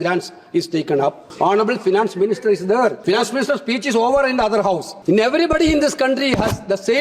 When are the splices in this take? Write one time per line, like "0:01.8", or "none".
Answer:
0:01.2
0:03.0
0:04.9